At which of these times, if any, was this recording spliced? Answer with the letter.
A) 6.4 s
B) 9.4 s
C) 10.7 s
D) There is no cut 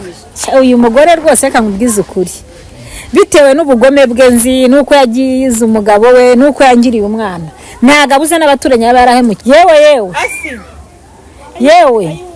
B